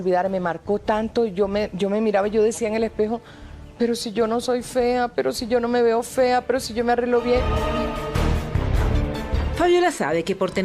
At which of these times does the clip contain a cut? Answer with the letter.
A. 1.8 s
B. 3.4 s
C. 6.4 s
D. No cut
D